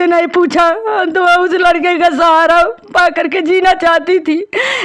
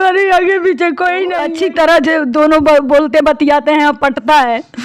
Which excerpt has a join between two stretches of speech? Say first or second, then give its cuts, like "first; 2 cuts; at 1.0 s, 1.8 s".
second; 1 cut; at 1.5 s